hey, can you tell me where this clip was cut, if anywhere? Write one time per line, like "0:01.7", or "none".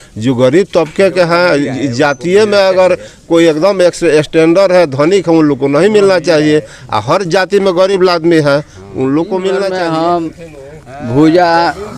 0:09.7